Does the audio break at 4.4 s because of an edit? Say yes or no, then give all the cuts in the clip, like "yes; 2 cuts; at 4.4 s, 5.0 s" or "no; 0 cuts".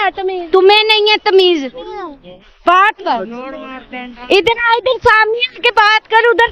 no; 1 cut; at 3.0 s